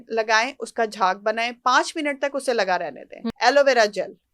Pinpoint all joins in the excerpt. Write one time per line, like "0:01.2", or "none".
0:03.2